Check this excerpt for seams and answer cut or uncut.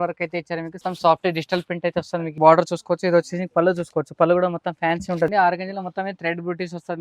cut